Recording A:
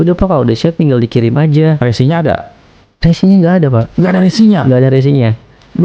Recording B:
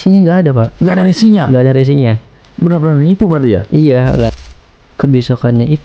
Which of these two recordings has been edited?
B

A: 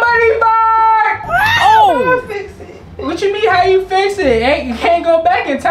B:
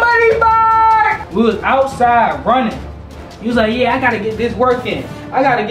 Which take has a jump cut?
B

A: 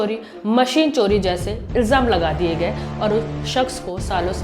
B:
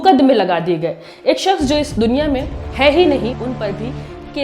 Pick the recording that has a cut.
B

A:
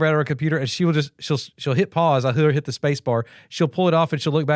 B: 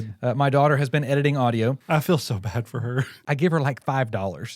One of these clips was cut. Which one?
B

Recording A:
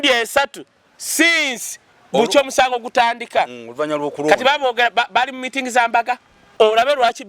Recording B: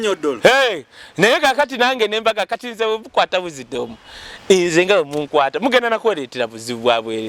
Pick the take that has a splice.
A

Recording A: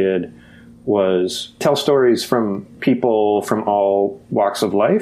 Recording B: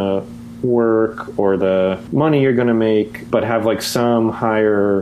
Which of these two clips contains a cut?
A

